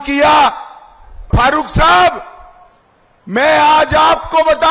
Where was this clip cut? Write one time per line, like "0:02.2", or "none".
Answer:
0:01.3